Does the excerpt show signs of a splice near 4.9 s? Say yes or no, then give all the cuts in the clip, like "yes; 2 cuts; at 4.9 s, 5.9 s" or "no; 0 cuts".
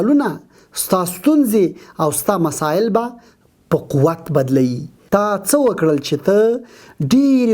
yes; 1 cut; at 4.9 s